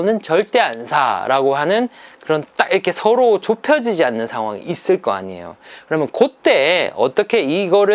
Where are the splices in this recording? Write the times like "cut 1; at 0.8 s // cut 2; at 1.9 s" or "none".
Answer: none